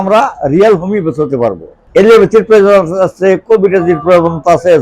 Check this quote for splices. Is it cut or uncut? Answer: cut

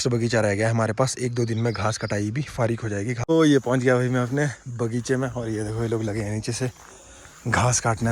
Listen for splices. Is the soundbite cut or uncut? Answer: cut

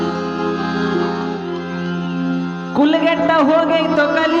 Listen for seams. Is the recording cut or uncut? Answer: uncut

